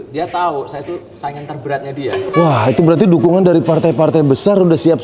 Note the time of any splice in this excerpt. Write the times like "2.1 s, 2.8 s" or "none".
2.2 s